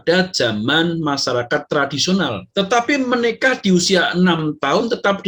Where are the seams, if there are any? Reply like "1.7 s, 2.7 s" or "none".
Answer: 2.4 s